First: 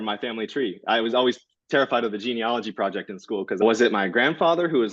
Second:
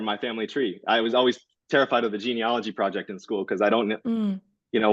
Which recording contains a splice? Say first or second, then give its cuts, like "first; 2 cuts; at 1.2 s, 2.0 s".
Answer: first; 1 cut; at 3.6 s